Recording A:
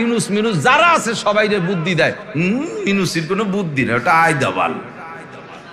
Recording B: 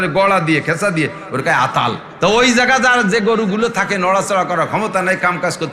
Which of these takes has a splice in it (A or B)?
B